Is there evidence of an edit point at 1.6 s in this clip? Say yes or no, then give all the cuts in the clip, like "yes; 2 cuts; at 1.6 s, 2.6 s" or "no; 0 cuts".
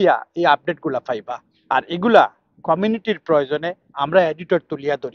no; 0 cuts